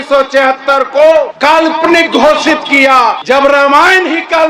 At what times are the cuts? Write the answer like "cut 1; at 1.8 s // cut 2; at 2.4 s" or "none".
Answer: cut 1; at 1.5 s // cut 2; at 3.2 s